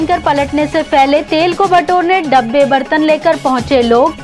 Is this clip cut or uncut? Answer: uncut